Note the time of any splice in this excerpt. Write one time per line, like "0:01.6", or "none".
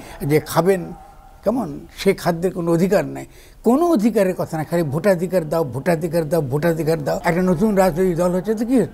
0:07.2